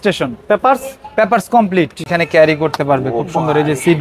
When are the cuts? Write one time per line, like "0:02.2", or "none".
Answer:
0:02.1